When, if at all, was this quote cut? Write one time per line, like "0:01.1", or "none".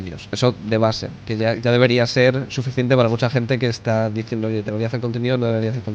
none